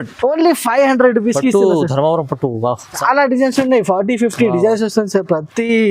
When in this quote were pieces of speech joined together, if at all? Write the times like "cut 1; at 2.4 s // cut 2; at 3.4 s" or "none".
cut 1; at 2.9 s